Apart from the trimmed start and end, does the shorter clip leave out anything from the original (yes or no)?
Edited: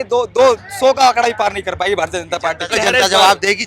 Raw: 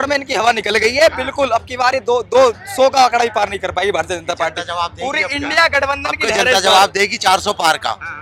yes